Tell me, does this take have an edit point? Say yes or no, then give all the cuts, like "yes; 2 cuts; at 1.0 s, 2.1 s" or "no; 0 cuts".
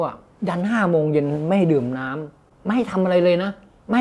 no; 0 cuts